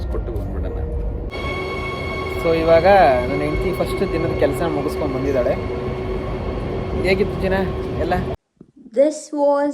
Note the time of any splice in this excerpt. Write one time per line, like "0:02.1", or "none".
0:01.3
0:08.3